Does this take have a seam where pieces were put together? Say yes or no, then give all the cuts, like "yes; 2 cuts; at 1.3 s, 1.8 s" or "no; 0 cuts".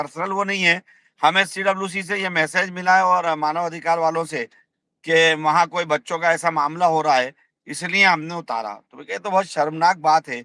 no; 0 cuts